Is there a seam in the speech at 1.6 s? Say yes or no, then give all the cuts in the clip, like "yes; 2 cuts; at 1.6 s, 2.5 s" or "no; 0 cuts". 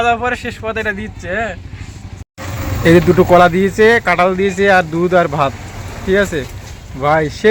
no; 0 cuts